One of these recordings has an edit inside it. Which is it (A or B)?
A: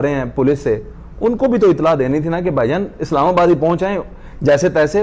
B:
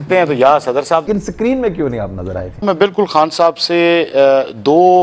B